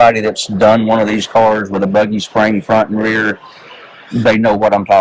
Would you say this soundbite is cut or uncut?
uncut